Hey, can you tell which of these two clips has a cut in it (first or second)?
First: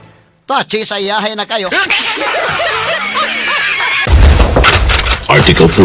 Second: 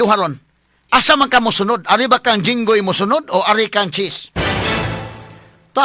first